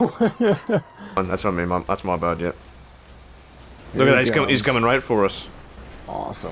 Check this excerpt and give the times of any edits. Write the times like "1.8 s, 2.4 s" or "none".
1.0 s